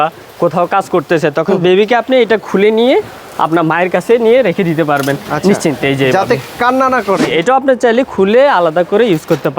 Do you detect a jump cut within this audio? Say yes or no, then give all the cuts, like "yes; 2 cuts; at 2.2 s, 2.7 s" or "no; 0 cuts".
yes; 1 cut; at 7.3 s